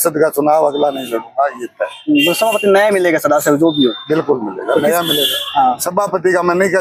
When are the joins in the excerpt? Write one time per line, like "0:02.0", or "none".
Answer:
none